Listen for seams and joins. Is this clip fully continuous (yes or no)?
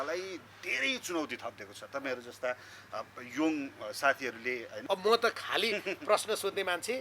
no